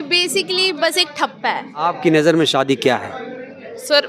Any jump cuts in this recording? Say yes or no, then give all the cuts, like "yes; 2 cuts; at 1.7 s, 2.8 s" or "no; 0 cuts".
yes; 1 cut; at 1.8 s